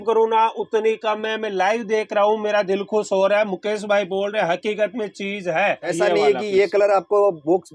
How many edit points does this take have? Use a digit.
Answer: 1